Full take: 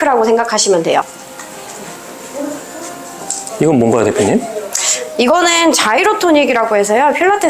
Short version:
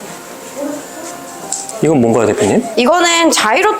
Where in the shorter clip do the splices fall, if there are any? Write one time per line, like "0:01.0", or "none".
0:02.7

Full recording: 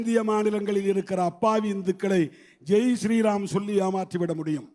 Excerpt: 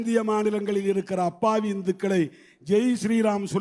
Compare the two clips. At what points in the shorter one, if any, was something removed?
none

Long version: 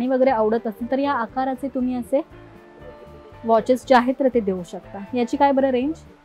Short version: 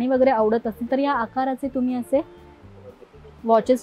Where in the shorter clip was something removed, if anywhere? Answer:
none

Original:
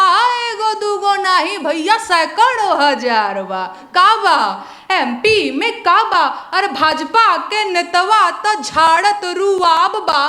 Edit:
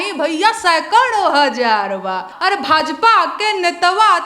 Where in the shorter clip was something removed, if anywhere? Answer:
0:02.3

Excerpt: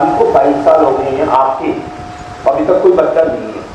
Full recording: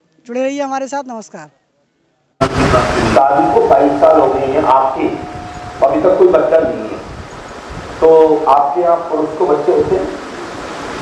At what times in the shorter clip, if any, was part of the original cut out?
none

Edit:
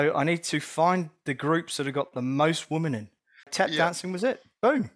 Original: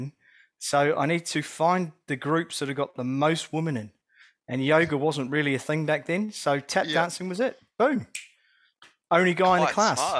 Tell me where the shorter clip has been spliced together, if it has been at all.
0:03.5

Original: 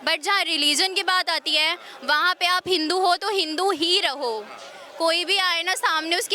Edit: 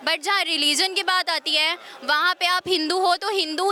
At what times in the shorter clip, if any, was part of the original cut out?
none

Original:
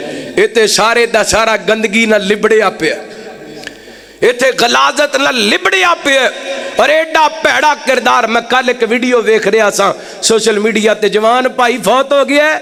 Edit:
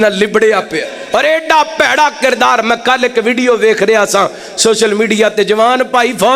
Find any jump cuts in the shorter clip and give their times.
0:00.9

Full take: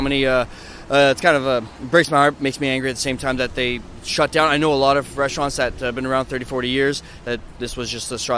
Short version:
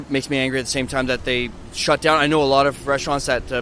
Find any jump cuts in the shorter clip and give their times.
none

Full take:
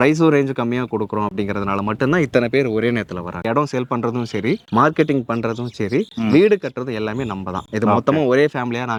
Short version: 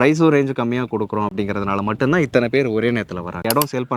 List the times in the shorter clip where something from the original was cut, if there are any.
none

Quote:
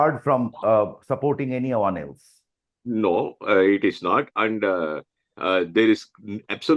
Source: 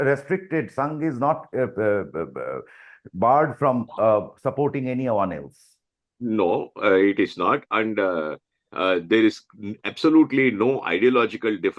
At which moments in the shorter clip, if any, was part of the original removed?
none

